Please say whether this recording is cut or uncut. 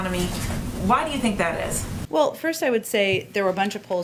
uncut